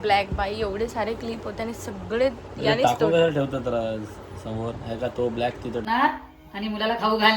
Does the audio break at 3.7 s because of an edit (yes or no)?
no